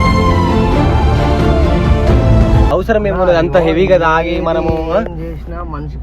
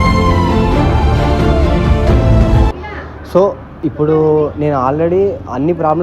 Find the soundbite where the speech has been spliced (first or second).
first